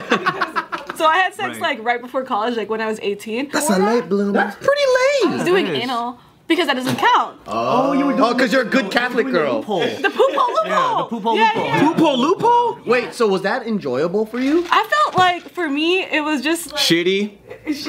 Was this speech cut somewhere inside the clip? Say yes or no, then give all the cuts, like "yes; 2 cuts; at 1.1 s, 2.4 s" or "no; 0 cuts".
yes; 1 cut; at 3.5 s